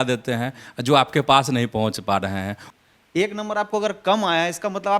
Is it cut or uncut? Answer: cut